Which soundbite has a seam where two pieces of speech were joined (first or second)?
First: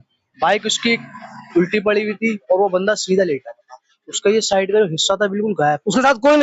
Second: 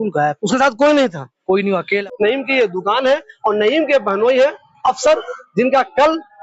second